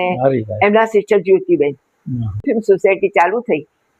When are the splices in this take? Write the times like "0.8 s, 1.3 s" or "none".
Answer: 2.4 s